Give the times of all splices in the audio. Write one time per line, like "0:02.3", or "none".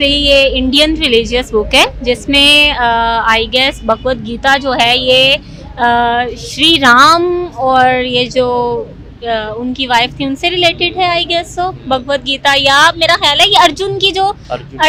none